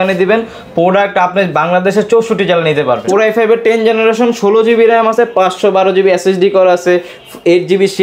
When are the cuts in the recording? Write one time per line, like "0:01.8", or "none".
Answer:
0:03.0